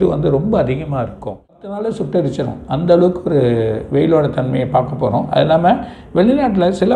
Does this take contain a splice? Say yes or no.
yes